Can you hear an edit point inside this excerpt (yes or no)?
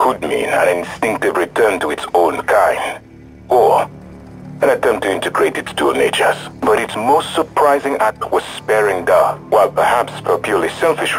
no